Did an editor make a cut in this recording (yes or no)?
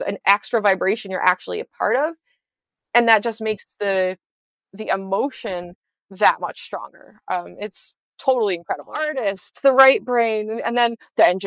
yes